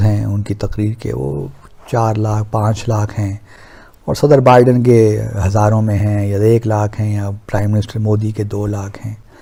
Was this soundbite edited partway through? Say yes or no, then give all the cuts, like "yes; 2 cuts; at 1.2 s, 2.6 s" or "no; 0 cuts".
no; 0 cuts